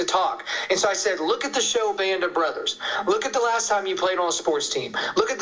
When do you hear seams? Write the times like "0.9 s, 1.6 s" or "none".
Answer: none